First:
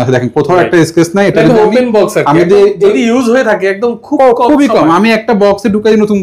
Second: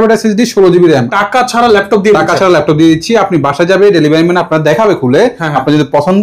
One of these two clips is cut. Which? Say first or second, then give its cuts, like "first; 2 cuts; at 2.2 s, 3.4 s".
second; 1 cut; at 1.1 s